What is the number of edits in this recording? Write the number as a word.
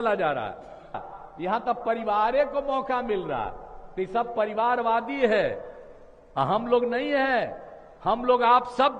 one